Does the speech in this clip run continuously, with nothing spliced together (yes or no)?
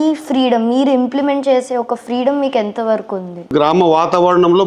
no